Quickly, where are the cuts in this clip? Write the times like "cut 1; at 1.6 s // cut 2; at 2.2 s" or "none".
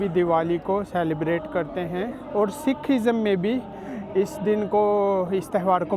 cut 1; at 2.2 s